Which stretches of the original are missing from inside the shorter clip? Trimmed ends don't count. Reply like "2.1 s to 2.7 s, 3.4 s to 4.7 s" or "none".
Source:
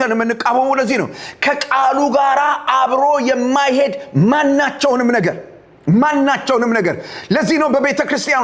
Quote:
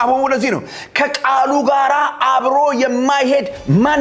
none